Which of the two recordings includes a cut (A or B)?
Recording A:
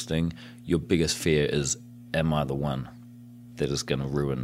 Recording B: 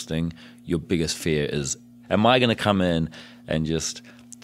B